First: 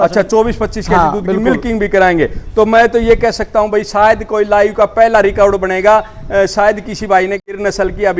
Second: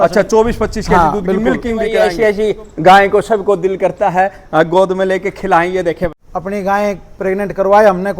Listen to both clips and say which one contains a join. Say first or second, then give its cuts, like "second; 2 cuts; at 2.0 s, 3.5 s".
second; 2 cuts; at 1.9 s, 6.2 s